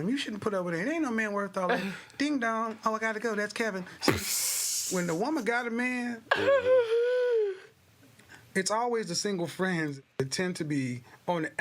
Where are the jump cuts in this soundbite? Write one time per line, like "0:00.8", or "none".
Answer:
0:09.9